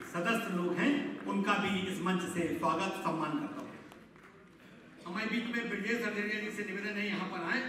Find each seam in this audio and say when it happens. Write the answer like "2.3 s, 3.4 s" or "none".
none